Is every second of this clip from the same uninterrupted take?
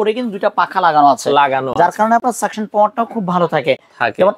yes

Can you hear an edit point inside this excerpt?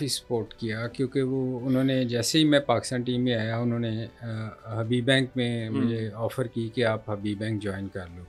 no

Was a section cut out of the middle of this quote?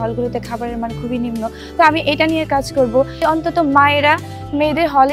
yes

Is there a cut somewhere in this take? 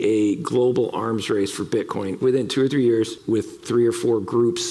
yes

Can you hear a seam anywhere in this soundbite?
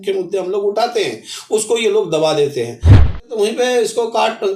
yes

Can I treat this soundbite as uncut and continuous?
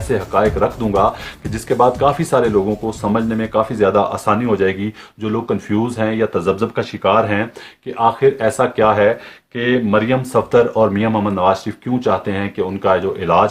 yes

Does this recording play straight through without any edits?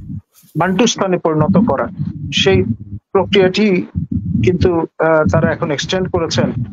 yes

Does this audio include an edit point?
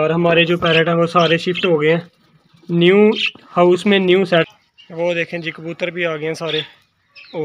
yes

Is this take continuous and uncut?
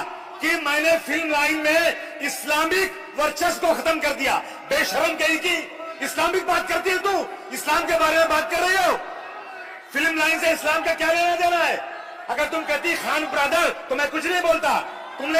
yes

